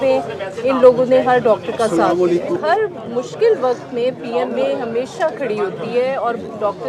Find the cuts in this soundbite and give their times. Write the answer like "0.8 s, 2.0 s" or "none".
2.5 s